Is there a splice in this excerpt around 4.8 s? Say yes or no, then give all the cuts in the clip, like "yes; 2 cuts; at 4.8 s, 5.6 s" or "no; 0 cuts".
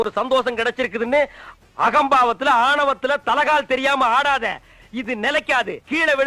no; 0 cuts